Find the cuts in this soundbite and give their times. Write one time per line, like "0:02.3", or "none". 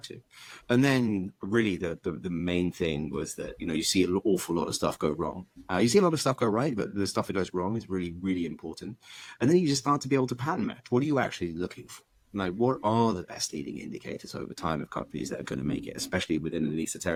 none